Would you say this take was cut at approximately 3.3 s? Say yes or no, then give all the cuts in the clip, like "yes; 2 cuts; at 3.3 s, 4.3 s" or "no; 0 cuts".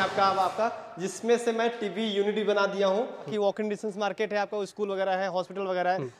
yes; 1 cut; at 3.3 s